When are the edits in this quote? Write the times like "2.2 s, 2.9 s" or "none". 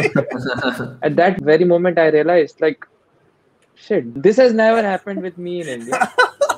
1.4 s, 4.1 s